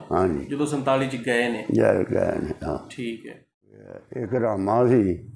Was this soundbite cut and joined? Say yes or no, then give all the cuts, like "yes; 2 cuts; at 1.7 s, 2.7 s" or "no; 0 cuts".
yes; 1 cut; at 4.1 s